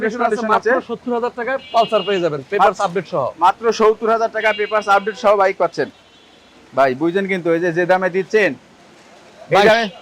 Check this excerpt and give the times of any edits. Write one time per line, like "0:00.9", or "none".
none